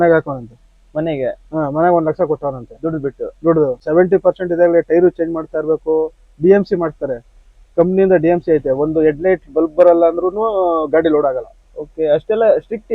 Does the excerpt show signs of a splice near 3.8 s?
yes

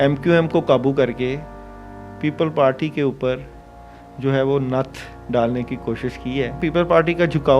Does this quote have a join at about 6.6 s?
yes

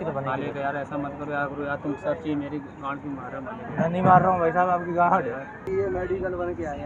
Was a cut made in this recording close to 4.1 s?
no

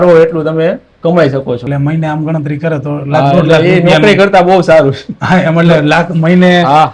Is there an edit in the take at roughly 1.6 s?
yes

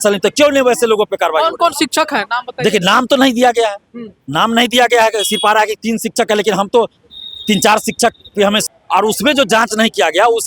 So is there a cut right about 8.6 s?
yes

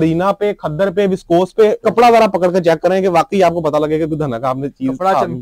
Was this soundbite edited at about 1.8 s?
yes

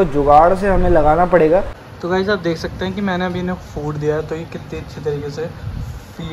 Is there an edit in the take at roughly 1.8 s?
yes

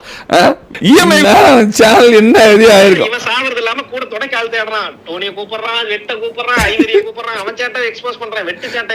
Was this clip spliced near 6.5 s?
no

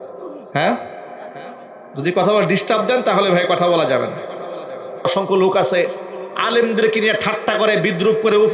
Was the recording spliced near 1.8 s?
no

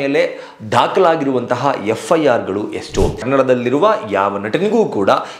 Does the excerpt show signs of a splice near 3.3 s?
yes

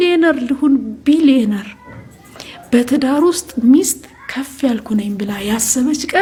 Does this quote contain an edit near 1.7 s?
no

